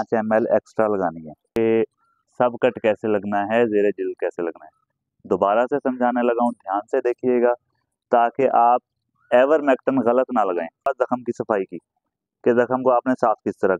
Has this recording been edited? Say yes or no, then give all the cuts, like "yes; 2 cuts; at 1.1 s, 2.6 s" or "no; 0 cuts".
yes; 2 cuts; at 1.6 s, 10.9 s